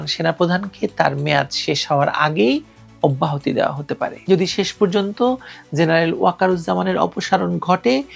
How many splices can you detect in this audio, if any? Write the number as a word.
one